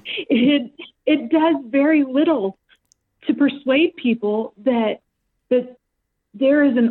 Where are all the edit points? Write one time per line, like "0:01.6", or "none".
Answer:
none